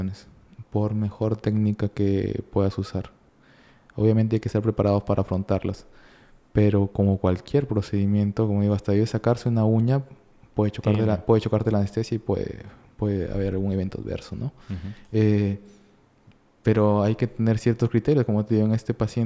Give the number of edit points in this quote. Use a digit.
0